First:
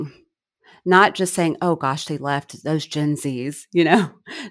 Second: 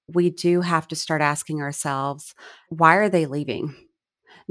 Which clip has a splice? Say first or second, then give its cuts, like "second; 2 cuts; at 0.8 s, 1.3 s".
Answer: second; 1 cut; at 2.7 s